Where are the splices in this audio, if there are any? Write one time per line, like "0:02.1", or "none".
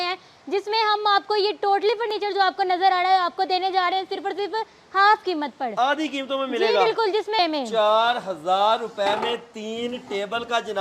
0:07.4